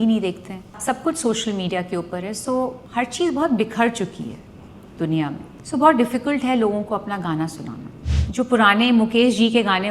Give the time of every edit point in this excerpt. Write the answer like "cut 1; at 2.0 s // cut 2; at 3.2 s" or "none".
cut 1; at 0.8 s // cut 2; at 2.8 s // cut 3; at 5.5 s // cut 4; at 8.1 s